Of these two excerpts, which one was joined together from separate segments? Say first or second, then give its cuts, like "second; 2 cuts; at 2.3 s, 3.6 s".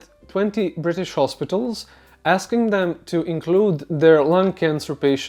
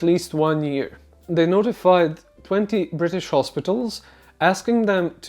second; 1 cut; at 1.2 s